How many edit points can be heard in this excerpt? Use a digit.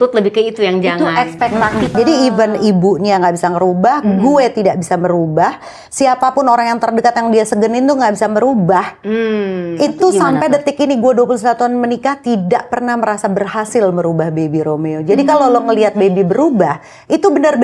1